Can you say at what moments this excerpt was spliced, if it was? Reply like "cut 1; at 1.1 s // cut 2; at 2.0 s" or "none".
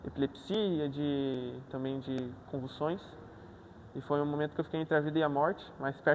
none